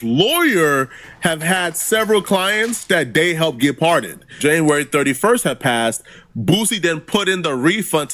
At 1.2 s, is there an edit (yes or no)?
no